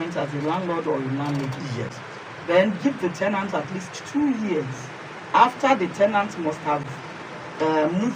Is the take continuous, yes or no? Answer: yes